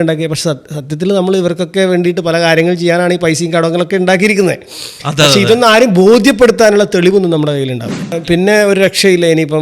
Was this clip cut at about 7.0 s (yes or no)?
no